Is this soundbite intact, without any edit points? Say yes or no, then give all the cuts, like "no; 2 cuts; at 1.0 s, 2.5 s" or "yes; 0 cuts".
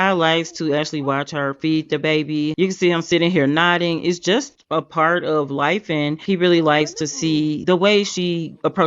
yes; 0 cuts